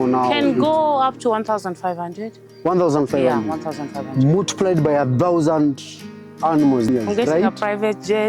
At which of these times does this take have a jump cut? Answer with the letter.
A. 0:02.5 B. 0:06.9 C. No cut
B